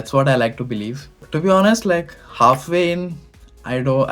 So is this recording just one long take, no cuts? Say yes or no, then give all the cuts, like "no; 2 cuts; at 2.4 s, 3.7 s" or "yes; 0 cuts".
no; 1 cut; at 1.3 s